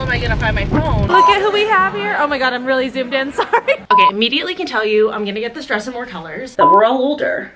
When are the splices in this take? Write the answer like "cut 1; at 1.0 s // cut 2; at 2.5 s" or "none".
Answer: cut 1; at 1.1 s // cut 2; at 3.8 s // cut 3; at 6.4 s